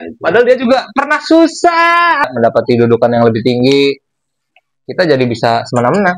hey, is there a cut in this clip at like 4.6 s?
no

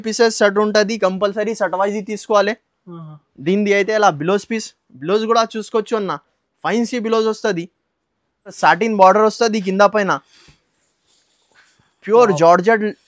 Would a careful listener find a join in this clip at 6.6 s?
no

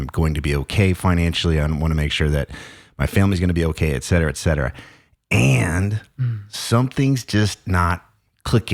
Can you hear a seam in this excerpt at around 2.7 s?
no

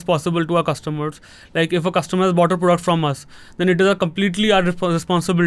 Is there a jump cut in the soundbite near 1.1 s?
no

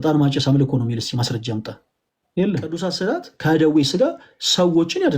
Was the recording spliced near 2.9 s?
yes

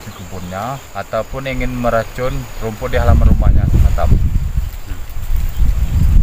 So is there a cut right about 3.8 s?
yes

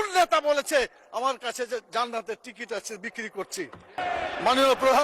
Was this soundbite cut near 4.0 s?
yes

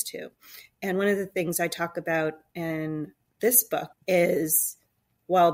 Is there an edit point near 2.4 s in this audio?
no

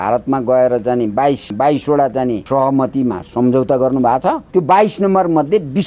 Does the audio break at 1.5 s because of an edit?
yes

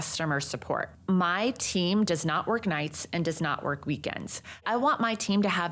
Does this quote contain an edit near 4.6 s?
yes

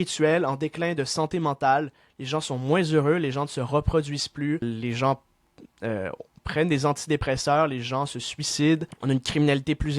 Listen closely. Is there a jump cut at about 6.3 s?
no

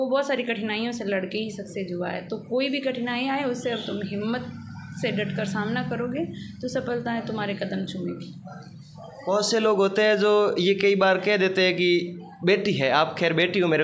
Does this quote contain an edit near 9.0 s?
no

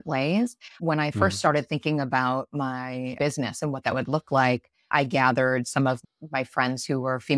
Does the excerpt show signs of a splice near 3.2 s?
yes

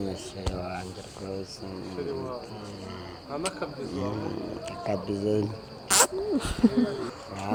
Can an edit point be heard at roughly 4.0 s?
no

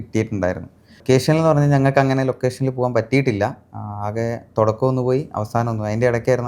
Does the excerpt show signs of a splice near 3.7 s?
no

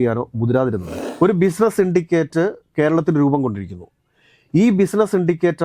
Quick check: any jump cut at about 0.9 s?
yes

